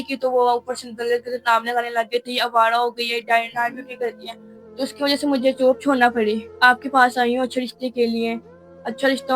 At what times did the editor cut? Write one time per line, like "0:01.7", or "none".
0:06.5